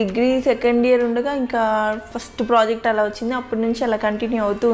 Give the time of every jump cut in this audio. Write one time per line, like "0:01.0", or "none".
none